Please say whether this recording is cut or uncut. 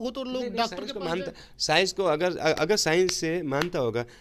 uncut